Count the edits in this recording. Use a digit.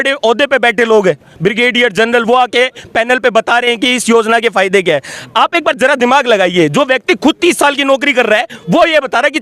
0